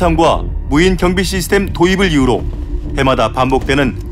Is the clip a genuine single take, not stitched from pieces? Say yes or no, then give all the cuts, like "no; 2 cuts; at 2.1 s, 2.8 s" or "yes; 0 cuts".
yes; 0 cuts